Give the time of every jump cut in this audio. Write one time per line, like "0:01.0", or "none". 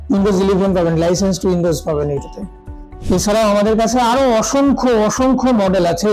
none